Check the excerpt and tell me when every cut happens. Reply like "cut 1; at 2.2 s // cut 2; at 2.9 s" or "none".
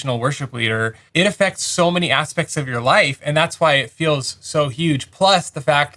cut 1; at 1.0 s